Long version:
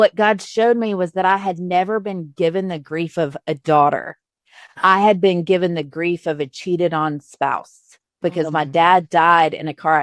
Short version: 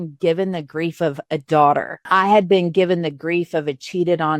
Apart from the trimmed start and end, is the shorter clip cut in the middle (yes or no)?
yes